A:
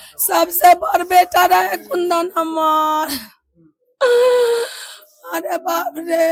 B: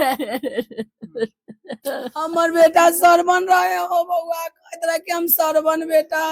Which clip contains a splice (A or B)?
B